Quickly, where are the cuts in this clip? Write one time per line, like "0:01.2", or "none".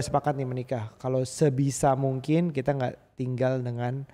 none